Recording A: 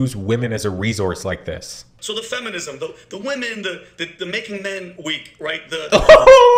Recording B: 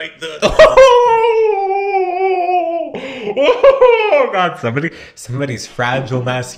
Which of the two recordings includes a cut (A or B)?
A